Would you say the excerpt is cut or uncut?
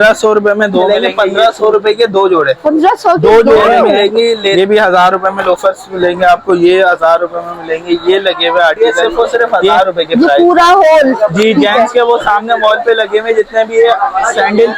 cut